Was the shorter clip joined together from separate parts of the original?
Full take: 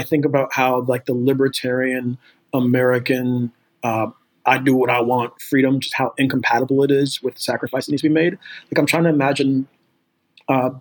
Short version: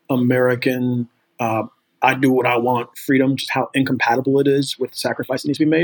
no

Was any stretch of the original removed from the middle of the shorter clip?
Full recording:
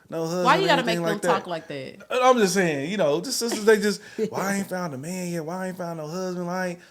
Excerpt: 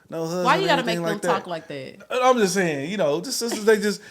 no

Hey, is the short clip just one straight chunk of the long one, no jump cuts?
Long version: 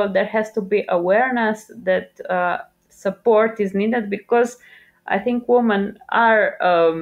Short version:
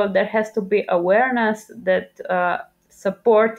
yes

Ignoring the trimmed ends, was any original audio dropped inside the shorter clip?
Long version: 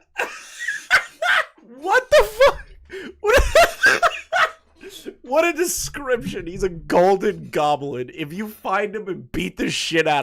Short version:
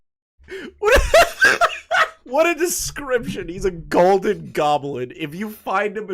yes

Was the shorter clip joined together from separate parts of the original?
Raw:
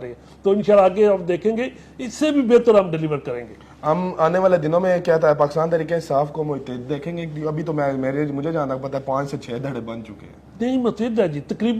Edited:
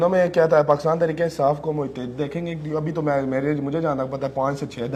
no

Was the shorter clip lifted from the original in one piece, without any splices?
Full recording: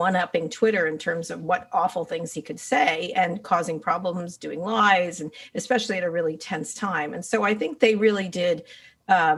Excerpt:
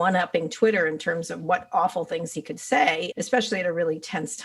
no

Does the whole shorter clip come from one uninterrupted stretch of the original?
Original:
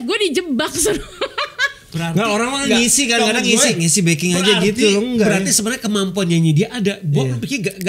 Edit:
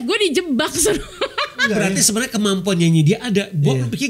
no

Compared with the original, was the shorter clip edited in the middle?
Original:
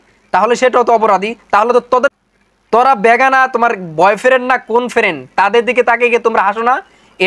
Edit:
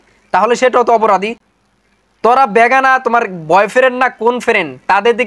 yes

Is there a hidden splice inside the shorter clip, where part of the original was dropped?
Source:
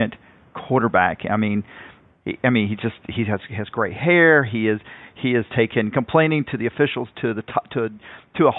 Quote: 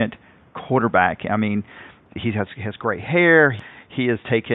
yes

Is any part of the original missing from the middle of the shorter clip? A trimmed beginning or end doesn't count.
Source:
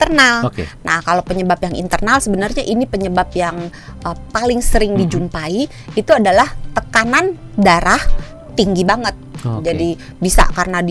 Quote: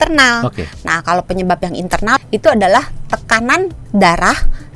yes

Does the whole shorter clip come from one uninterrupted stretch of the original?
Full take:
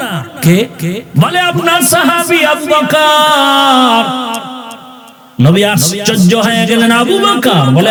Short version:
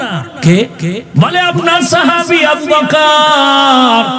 yes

